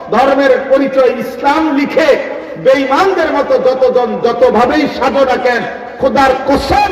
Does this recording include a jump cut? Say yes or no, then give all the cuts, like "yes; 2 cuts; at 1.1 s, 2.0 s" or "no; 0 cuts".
no; 0 cuts